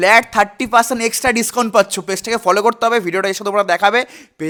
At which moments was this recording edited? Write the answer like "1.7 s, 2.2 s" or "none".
none